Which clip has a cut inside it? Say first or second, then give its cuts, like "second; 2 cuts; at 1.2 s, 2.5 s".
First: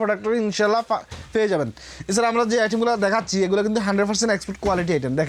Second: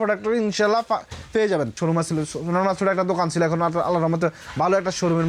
second; 1 cut; at 1.8 s